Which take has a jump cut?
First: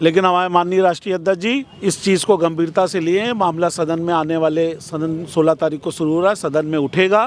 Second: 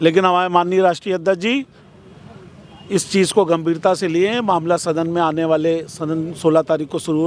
first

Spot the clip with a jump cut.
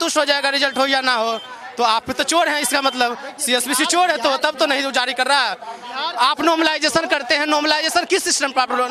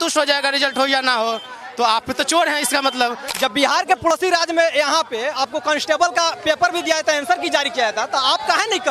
second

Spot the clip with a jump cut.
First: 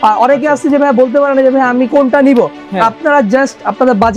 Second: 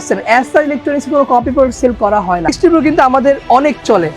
second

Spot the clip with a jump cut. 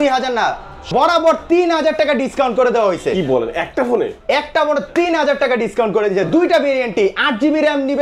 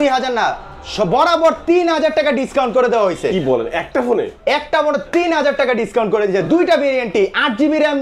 first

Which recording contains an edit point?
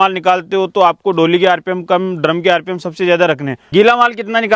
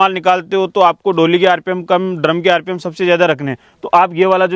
first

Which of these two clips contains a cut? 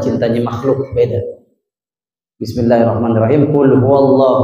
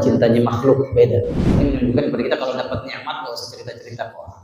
second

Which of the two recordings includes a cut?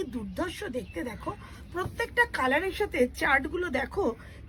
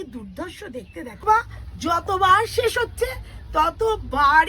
second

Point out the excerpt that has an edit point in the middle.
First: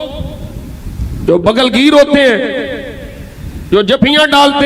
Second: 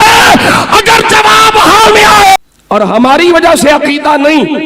second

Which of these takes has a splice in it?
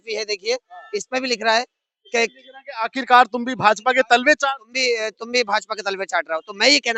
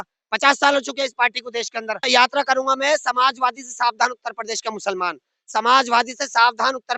second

